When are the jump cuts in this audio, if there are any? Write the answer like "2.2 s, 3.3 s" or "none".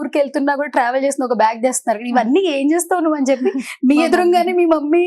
none